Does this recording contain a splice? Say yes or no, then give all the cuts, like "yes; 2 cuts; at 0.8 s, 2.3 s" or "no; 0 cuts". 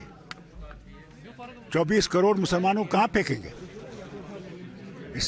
no; 0 cuts